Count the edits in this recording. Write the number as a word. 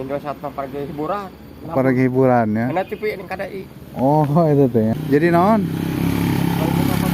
one